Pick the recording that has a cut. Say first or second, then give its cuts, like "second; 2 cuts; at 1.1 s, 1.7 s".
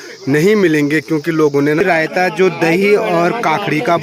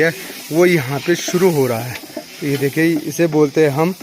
first; 1 cut; at 1.8 s